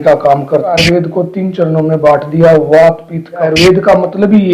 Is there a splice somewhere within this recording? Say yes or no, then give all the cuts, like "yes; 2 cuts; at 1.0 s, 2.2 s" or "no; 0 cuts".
yes; 2 cuts; at 0.8 s, 3.5 s